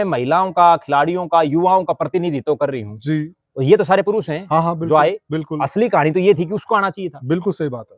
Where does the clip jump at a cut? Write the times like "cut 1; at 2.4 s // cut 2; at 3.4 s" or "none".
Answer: none